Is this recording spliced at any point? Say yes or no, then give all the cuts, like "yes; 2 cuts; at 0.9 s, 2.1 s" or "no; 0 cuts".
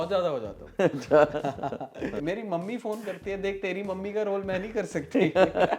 yes; 1 cut; at 2.2 s